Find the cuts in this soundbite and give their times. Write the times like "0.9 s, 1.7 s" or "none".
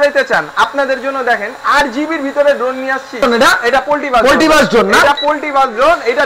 3.2 s